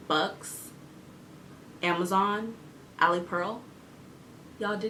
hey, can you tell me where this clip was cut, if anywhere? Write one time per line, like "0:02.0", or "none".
none